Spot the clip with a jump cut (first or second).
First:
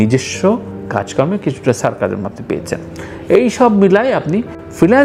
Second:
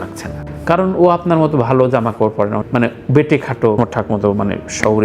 second